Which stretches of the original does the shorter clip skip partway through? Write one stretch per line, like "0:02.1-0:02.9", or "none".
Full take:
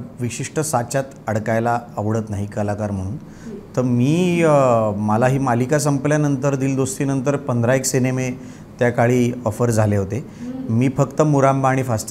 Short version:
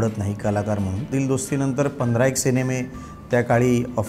0:03.2-0:06.6